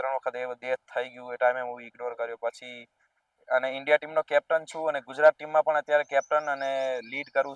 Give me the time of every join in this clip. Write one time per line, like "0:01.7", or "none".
0:03.3